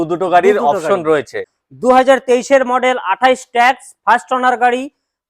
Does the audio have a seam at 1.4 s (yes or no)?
yes